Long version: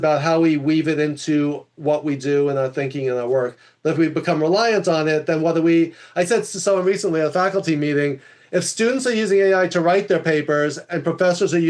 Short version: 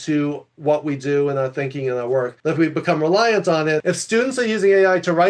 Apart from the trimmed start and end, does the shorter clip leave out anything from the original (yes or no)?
yes